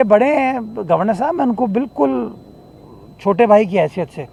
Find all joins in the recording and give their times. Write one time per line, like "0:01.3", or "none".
none